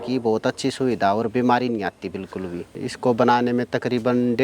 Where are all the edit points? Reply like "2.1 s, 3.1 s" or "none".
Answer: 2.7 s